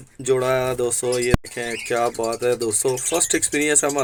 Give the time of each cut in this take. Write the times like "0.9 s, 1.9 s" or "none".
none